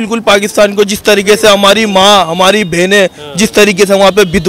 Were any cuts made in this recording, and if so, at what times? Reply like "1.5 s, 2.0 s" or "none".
none